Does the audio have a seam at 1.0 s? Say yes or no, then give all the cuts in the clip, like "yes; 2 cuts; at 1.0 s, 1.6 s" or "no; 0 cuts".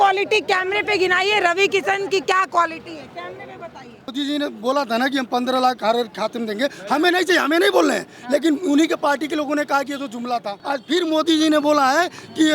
no; 2 cuts; at 4.1 s, 10.6 s